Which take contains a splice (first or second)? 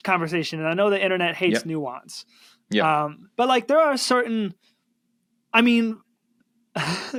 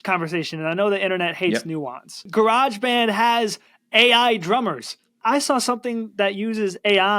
second